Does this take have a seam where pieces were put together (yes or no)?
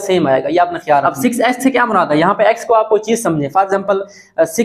yes